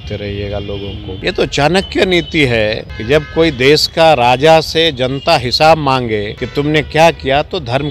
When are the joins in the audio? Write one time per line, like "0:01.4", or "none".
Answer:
0:01.1
0:02.9
0:06.4